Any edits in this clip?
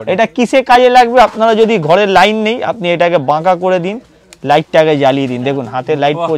no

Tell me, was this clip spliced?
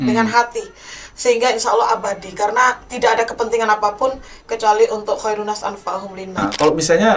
yes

